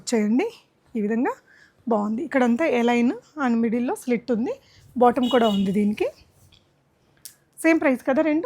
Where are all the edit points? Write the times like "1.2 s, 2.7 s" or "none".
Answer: none